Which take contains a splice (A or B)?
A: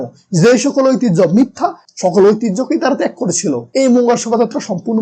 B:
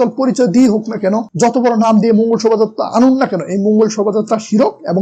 A